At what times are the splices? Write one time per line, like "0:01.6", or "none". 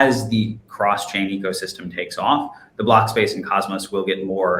none